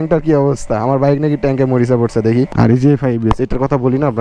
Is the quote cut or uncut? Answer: cut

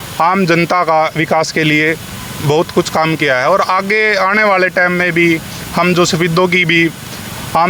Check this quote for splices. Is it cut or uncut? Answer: uncut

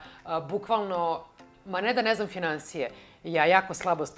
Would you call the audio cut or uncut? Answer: uncut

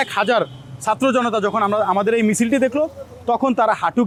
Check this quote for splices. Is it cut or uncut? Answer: uncut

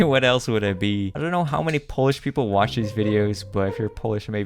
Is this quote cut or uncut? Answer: cut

